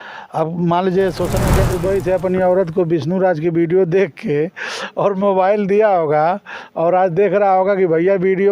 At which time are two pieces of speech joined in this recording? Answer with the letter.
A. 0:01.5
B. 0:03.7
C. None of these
A